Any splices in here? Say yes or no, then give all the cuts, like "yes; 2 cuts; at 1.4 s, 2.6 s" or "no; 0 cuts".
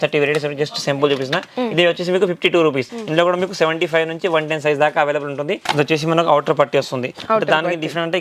yes; 2 cuts; at 2.9 s, 5.6 s